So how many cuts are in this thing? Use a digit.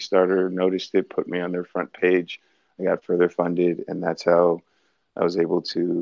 0